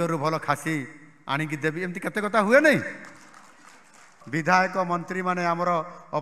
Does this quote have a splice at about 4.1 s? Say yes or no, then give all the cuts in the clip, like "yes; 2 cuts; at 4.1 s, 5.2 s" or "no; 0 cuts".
yes; 1 cut; at 4.1 s